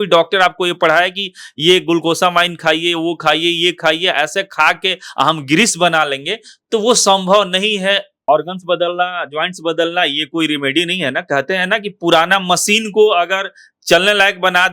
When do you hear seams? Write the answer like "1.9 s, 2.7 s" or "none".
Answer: 8.3 s

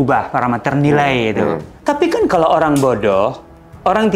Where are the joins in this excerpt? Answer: 1.7 s

